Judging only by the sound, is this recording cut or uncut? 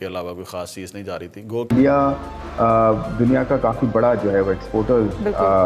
cut